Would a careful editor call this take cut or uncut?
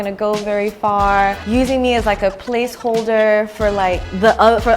cut